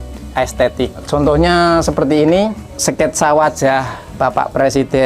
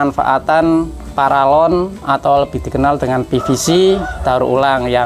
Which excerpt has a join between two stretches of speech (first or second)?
first